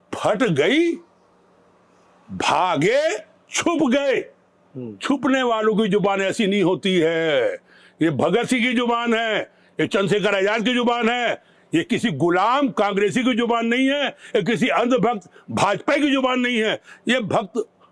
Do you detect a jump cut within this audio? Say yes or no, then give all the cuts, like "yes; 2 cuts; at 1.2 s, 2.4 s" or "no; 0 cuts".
no; 0 cuts